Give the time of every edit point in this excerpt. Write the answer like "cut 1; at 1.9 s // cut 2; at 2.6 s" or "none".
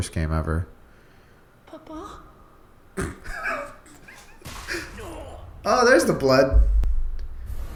none

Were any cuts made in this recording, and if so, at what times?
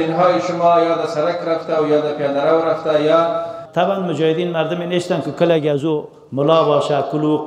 cut 1; at 3.6 s

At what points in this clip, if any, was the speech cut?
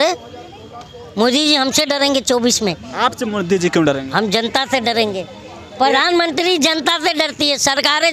none

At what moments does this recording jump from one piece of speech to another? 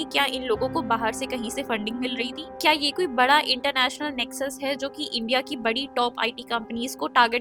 none

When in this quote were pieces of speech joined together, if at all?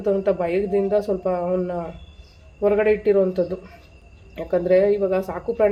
none

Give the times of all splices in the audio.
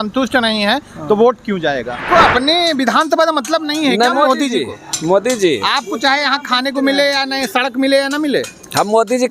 cut 1; at 2.0 s

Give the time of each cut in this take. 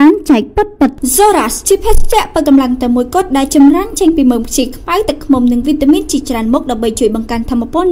cut 1; at 1.0 s

